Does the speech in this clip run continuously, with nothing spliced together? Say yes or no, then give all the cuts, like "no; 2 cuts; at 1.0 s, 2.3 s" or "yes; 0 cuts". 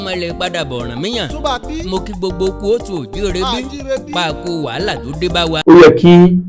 no; 1 cut; at 5.5 s